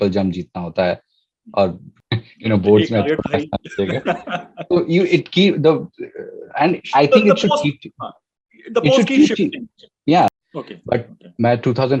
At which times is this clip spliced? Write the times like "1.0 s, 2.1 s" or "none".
1.9 s, 10.3 s